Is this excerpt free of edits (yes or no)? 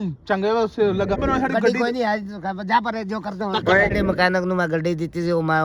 no